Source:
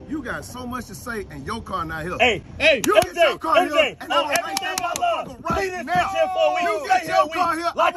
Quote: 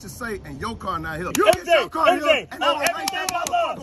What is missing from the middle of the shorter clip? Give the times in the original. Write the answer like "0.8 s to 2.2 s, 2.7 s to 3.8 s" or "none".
2.2 s to 2.8 s